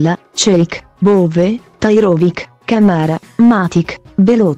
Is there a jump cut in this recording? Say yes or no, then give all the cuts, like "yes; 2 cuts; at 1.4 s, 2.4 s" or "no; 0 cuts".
no; 0 cuts